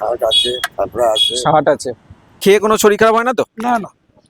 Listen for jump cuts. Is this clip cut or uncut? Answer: cut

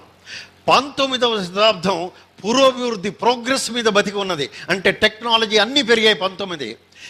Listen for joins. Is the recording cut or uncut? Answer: uncut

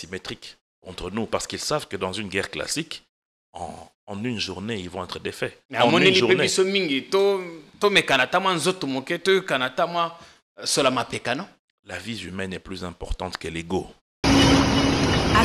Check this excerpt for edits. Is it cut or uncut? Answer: cut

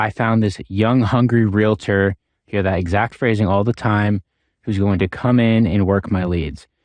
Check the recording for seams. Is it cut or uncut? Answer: uncut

